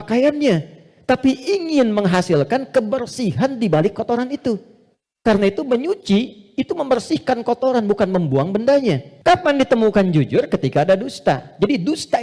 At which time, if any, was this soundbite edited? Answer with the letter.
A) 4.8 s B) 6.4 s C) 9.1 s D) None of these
C